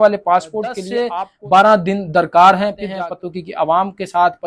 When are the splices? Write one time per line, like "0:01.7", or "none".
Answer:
0:01.1
0:02.8